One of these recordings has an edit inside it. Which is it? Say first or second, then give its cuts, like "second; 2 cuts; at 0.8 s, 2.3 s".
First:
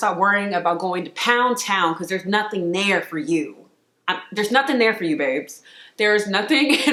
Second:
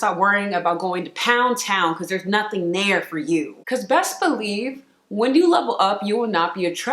second; 1 cut; at 3.6 s